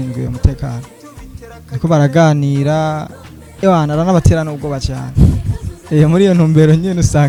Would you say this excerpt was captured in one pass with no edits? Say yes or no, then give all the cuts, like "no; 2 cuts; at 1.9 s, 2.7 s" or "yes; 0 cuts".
yes; 0 cuts